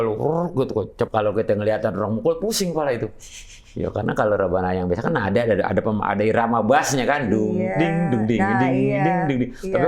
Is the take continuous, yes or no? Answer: no